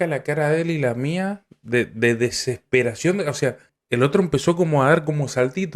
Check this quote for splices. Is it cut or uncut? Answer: cut